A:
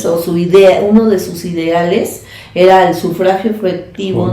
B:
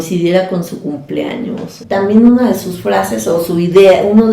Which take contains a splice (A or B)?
B